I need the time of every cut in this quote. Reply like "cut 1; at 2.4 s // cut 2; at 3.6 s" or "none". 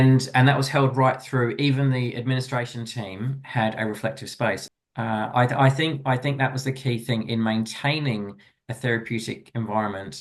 cut 1; at 4.6 s

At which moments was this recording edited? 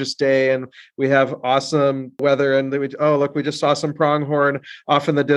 cut 1; at 2.2 s

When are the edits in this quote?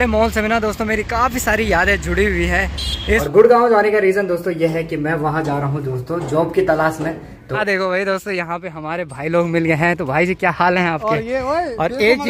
cut 1; at 2.9 s // cut 2; at 7.5 s

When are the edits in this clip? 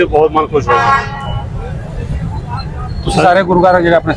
none

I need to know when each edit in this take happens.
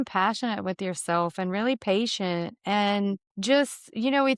cut 1; at 3.3 s

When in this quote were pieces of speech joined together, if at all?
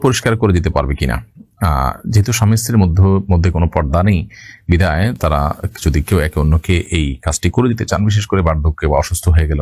none

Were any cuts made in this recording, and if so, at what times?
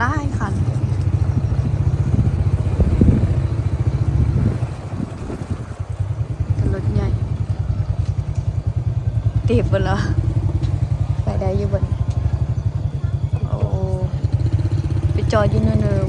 none

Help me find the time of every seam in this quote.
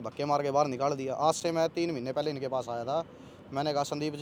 none

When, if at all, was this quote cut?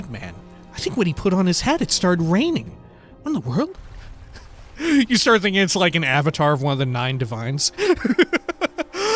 cut 1; at 7.7 s

